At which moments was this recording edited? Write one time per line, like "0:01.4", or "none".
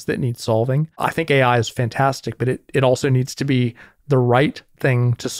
0:00.9